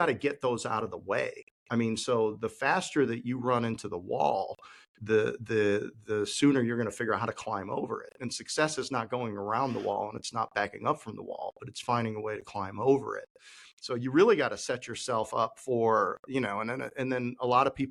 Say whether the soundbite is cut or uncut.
uncut